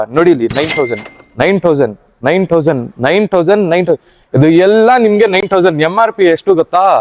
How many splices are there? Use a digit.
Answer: 0